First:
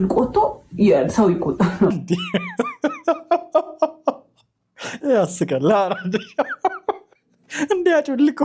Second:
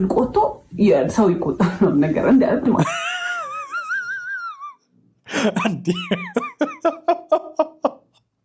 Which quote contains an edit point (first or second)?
first